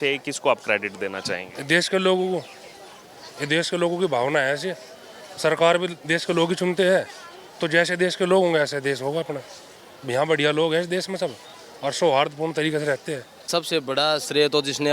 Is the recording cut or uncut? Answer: cut